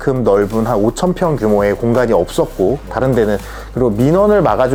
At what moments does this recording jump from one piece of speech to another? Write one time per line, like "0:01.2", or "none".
none